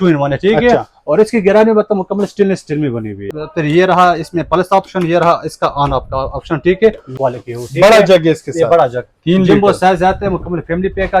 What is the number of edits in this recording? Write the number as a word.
two